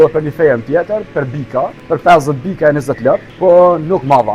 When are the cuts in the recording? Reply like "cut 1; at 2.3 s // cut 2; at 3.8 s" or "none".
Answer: cut 1; at 1.8 s // cut 2; at 3.3 s